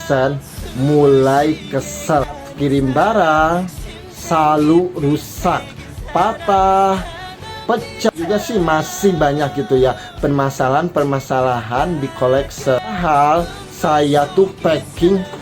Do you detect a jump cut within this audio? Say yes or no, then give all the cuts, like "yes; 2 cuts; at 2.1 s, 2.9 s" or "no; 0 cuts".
yes; 3 cuts; at 2.3 s, 8.1 s, 12.9 s